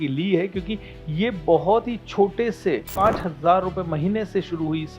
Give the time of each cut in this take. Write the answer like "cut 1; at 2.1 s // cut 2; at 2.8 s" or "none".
cut 1; at 2.9 s